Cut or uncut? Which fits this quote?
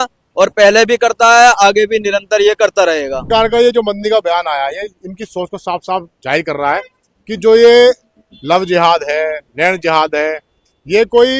cut